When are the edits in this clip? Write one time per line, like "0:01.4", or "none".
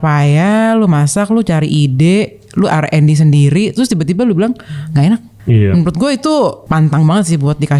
0:05.3
0:06.6